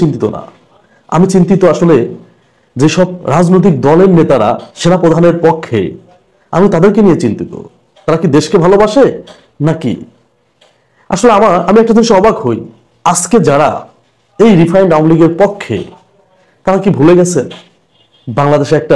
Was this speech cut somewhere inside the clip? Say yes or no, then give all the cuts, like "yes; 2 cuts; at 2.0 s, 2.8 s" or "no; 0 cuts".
no; 0 cuts